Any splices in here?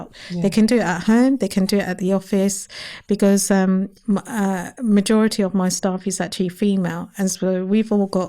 no; 0 cuts

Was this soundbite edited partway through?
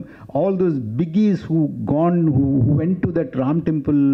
no; 0 cuts

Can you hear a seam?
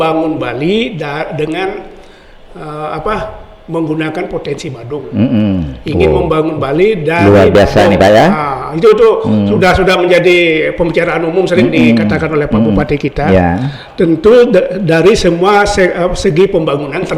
no; 0 cuts

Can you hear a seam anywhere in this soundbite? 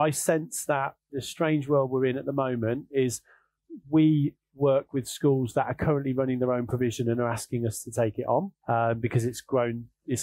yes; 2 cuts; at 1.1 s, 8.5 s

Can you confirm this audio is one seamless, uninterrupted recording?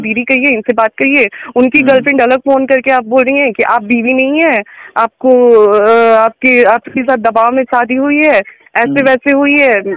yes; 0 cuts

